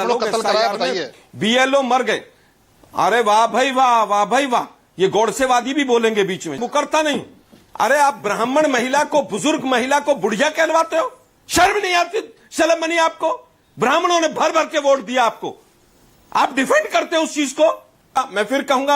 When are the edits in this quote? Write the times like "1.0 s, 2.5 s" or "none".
6.6 s, 18.2 s